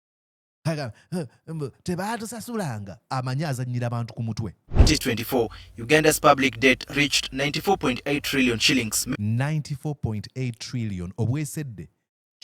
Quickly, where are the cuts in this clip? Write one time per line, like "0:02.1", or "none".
0:04.8
0:09.0